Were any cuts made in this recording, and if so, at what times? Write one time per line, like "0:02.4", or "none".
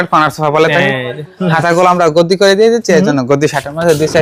none